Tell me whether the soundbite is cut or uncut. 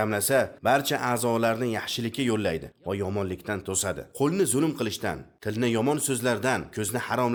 uncut